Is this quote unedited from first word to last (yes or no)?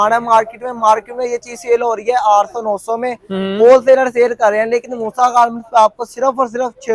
yes